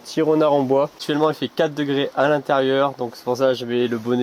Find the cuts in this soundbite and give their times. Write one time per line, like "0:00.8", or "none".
0:01.0